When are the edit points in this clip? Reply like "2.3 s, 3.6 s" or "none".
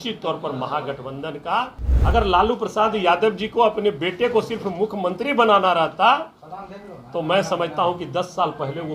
1.8 s